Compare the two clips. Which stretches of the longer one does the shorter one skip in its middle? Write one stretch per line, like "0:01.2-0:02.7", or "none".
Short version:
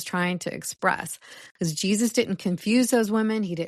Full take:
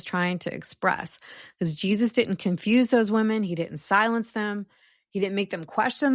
none